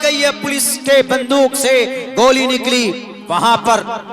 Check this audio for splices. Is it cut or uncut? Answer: cut